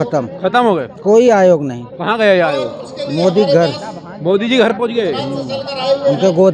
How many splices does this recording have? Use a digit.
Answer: 0